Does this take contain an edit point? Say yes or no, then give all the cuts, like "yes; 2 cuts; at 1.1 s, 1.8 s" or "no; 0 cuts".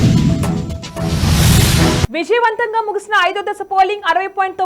yes; 1 cut; at 2.0 s